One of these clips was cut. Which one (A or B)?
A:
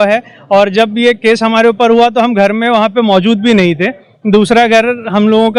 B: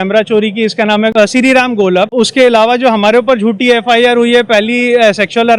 B